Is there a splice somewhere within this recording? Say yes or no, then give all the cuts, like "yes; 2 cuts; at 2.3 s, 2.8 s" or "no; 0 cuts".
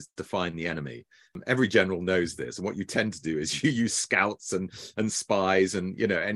yes; 1 cut; at 1.4 s